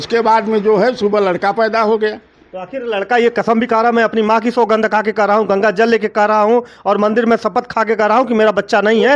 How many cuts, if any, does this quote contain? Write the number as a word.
zero